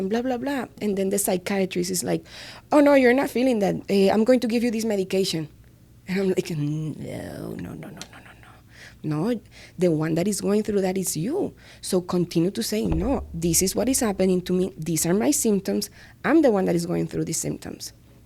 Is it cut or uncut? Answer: uncut